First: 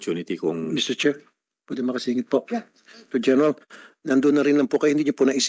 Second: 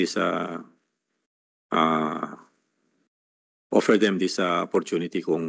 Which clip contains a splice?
first; 1 cut; at 3.1 s

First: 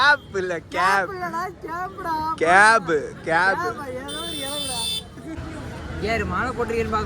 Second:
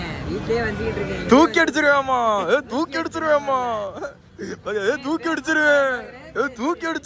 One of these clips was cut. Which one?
first; 1 cut; at 5.4 s

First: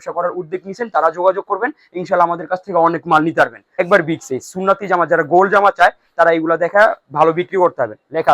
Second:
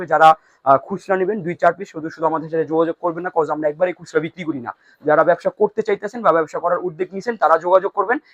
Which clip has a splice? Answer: first; 1 cut; at 3.6 s

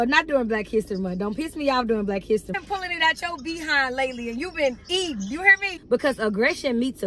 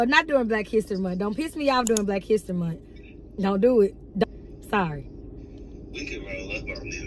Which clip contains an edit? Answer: first; 2 cuts; at 2.6 s, 5.8 s

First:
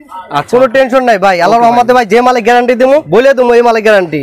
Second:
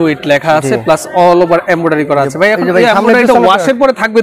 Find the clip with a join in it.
first; 1 cut; at 3.1 s

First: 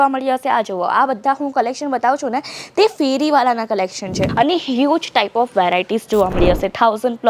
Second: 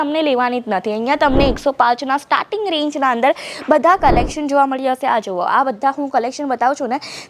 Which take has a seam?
first; 1 cut; at 4.2 s

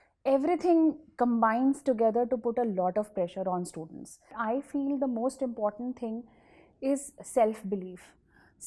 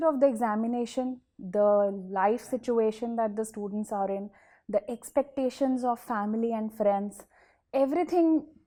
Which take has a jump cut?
first; 1 cut; at 4.4 s

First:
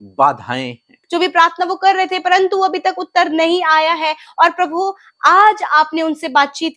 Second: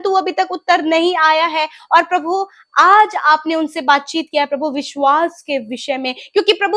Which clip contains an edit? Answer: first; 1 cut; at 1.0 s

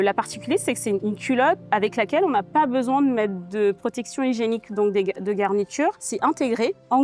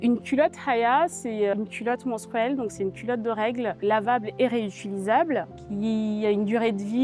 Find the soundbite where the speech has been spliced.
second; 3 cuts; at 1.5 s, 3.8 s, 5.6 s

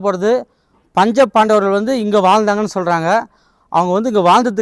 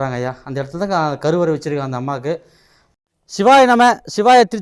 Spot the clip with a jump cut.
second; 1 cut; at 3.0 s

